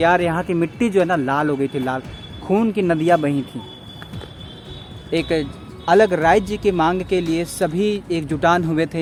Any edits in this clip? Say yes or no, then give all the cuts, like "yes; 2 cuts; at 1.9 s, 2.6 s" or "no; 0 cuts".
no; 0 cuts